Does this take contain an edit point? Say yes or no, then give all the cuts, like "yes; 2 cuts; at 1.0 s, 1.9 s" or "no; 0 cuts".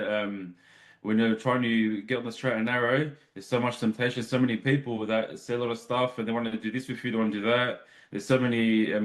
no; 0 cuts